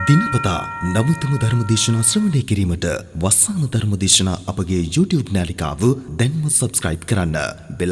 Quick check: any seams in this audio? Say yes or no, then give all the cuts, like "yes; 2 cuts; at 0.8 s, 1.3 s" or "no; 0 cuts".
no; 0 cuts